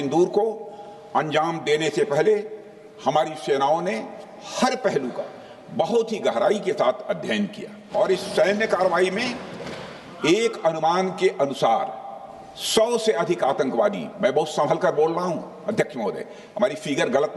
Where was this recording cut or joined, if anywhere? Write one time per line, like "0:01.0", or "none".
0:07.9